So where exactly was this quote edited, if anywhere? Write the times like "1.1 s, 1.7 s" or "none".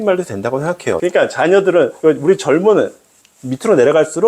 1.0 s